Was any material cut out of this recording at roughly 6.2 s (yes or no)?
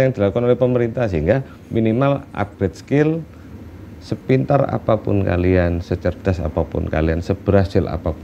no